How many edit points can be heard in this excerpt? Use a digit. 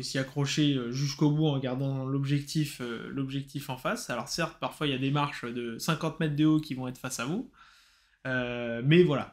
0